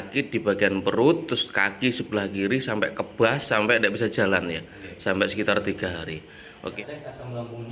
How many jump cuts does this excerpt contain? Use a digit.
1